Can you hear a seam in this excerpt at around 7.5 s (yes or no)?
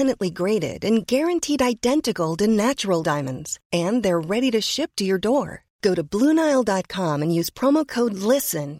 no